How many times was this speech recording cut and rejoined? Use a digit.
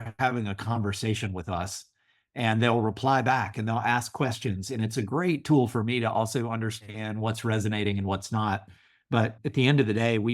1